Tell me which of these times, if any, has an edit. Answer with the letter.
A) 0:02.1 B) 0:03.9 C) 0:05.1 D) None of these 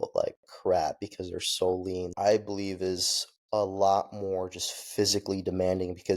A